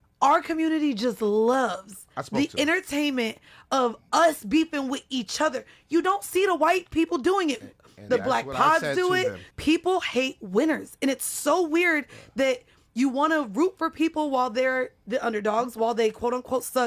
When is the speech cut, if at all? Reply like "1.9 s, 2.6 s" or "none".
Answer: 9.4 s